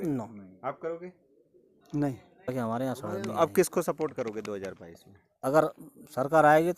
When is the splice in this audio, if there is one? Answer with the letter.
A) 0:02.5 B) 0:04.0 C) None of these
A